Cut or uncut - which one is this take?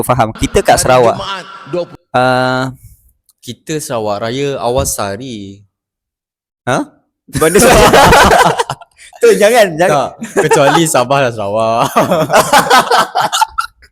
uncut